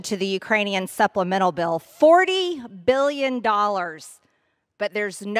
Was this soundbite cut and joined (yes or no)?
yes